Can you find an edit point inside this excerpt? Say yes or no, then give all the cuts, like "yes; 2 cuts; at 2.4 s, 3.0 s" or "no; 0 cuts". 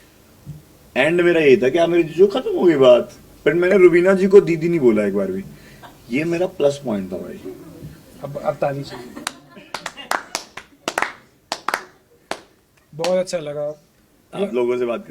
no; 0 cuts